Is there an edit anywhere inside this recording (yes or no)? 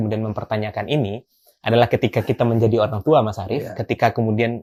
no